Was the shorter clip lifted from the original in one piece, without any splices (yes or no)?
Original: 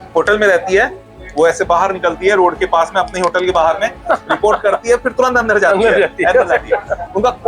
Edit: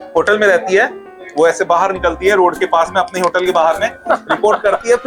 yes